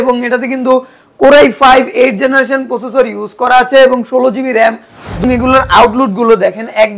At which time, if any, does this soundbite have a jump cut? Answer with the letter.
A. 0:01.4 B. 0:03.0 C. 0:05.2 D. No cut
C